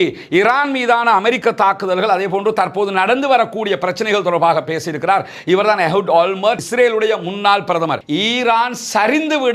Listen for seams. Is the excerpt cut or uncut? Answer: cut